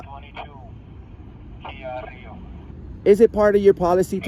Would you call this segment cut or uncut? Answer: uncut